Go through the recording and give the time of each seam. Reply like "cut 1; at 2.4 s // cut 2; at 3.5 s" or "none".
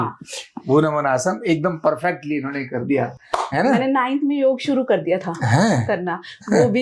none